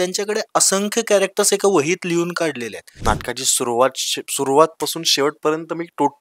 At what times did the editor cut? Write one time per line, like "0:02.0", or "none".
0:02.9